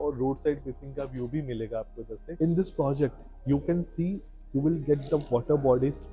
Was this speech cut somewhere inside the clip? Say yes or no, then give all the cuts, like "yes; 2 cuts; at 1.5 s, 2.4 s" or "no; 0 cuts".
yes; 1 cut; at 2.2 s